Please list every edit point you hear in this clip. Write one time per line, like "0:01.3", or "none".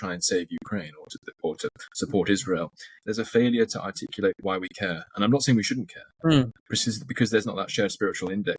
0:03.0
0:06.5